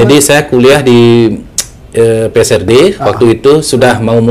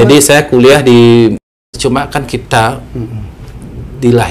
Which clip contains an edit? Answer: second; 1 cut; at 1.7 s

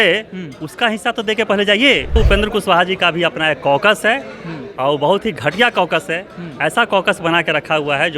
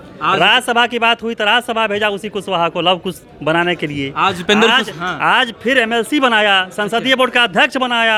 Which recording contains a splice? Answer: first; 1 cut; at 2.1 s

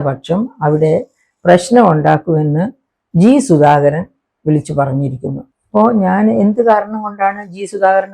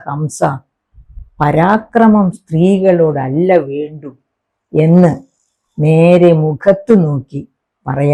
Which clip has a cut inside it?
first; 1 cut; at 5.4 s

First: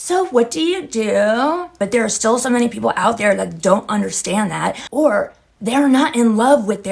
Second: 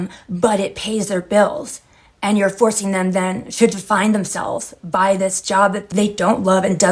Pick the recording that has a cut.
first; 1 cut; at 1.7 s

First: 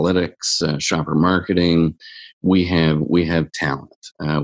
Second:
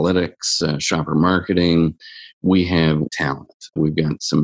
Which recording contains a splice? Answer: second; 1 cut; at 3.1 s

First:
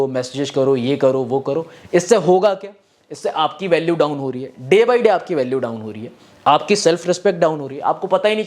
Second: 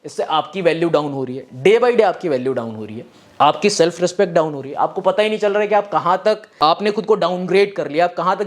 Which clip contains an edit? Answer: second; 1 cut; at 6.8 s

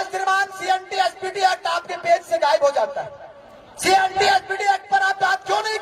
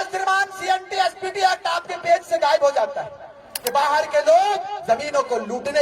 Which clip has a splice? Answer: second; 1 cut; at 3.6 s

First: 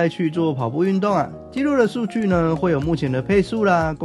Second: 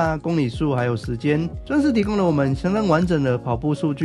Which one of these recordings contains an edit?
second; 1 cut; at 1.7 s

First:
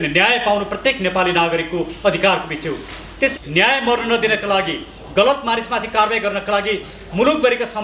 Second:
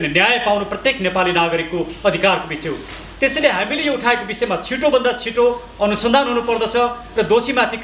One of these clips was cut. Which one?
first; 1 cut; at 3.3 s

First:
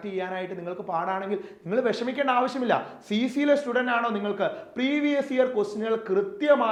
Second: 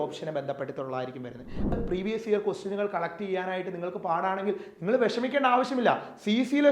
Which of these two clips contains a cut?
second; 1 cut; at 1.7 s

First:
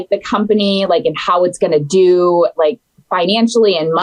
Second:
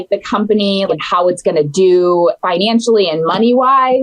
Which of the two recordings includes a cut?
second; 2 cuts; at 0.9 s, 2.4 s

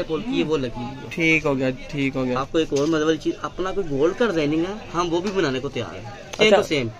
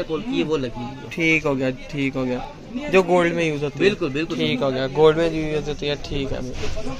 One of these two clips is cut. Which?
first; 1 cut; at 2.4 s

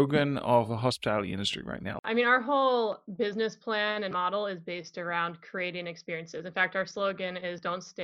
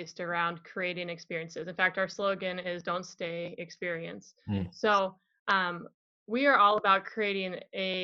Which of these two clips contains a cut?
first; 1 cut; at 2.0 s

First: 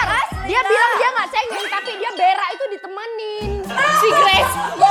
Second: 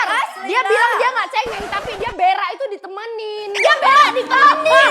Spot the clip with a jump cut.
second; 1 cut; at 3.6 s

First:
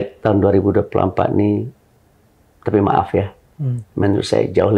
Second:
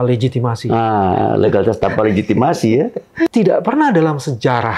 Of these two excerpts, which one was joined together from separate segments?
second; 1 cut; at 3.3 s

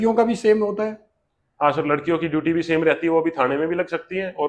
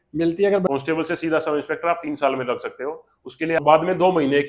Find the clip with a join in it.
second; 2 cuts; at 0.7 s, 3.6 s

